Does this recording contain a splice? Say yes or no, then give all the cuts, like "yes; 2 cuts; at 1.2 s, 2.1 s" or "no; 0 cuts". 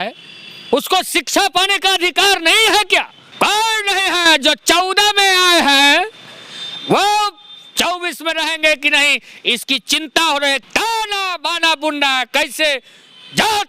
yes; 2 cuts; at 3.2 s, 10.6 s